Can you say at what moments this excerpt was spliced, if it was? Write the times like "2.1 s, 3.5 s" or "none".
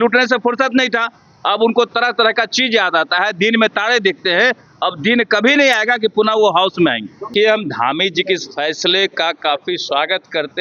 7.3 s